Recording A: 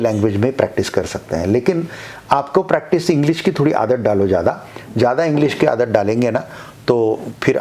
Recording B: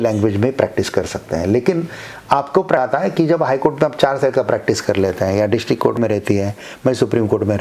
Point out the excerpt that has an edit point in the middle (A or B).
B